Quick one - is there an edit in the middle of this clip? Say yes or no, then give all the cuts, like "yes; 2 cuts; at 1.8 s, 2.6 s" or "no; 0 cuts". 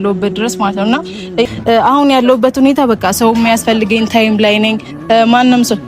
yes; 1 cut; at 1.4 s